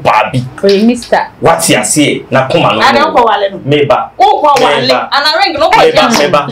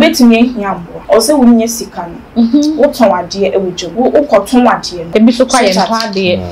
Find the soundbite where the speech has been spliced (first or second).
second